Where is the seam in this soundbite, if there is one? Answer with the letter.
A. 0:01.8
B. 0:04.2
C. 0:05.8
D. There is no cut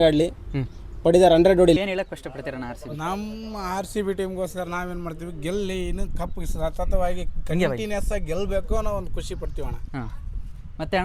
A